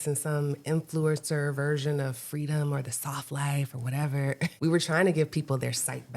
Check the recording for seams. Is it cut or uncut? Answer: cut